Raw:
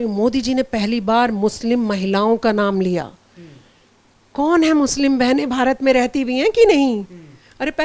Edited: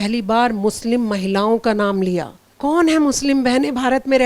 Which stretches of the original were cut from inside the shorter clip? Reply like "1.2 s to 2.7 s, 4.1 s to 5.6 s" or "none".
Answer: 3.2 s to 4.2 s

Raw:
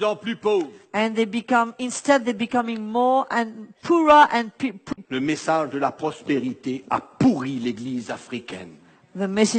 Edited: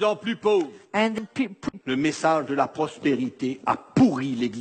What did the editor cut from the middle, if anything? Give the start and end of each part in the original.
1.2 s to 4.4 s

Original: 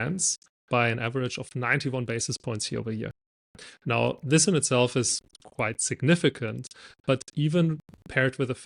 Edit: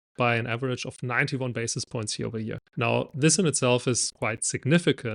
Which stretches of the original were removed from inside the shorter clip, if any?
3.2 s to 3.7 s, 5.2 s to 5.5 s

